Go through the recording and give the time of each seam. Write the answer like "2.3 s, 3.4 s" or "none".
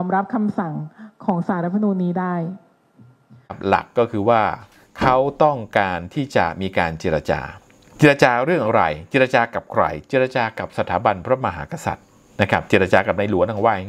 3.6 s